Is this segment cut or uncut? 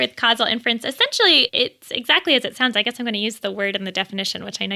uncut